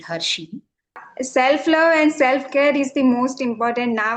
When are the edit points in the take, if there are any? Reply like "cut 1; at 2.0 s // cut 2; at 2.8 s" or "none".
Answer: cut 1; at 1.0 s